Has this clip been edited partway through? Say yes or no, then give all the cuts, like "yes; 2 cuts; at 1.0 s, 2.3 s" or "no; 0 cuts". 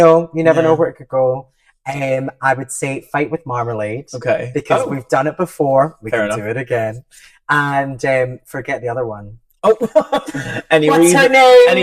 no; 0 cuts